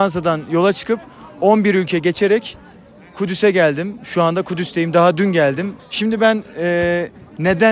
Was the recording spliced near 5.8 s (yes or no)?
yes